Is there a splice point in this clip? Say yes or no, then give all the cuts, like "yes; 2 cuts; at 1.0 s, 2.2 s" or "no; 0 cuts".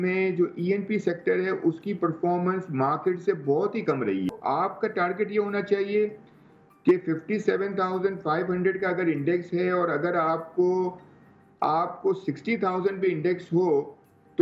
yes; 1 cut; at 4.3 s